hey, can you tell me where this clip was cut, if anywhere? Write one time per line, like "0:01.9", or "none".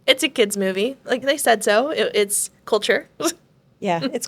0:01.2